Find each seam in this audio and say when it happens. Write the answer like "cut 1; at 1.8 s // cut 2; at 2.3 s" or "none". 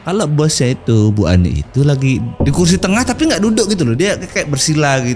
cut 1; at 2.3 s